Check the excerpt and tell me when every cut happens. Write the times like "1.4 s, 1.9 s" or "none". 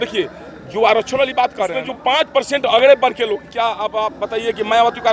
1.9 s